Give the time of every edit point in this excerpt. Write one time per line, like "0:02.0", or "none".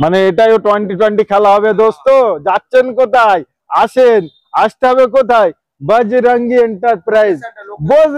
none